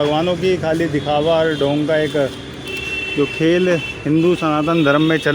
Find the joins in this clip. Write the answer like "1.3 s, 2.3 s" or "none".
none